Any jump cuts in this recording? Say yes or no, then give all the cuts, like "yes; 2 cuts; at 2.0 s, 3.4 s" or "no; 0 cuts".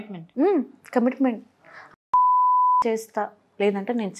no; 0 cuts